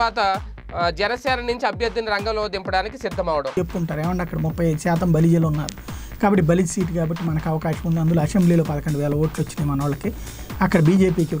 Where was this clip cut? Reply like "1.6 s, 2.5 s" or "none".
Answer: 3.6 s

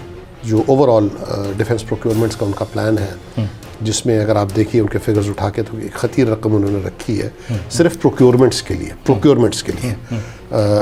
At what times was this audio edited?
none

